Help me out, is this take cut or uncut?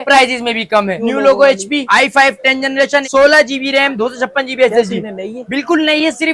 cut